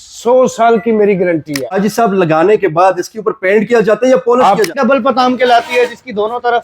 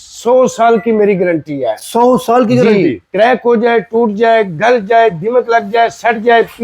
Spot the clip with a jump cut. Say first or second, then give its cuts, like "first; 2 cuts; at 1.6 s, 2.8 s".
first; 2 cuts; at 1.6 s, 4.8 s